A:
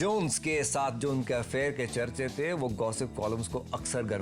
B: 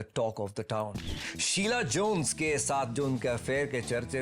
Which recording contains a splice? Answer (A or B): B